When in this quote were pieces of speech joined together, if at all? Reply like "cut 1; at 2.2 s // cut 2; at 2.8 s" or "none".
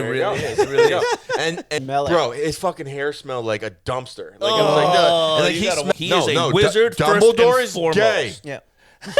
cut 1; at 1.7 s // cut 2; at 5.9 s